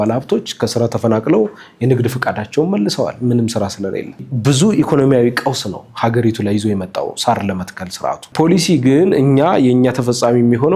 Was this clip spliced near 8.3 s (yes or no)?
yes